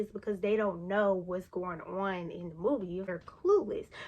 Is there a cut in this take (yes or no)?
yes